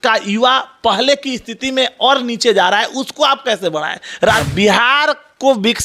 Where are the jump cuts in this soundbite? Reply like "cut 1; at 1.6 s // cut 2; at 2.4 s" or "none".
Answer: cut 1; at 4.5 s